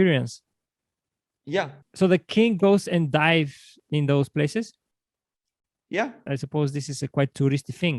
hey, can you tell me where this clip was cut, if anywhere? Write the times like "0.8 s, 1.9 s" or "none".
1.8 s, 6.2 s